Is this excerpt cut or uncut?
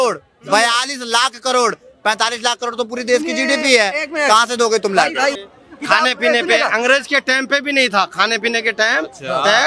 cut